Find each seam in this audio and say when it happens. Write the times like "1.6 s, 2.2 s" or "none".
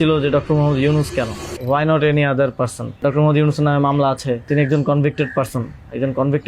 1.5 s, 3.0 s, 4.5 s